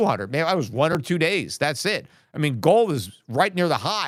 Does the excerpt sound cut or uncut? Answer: uncut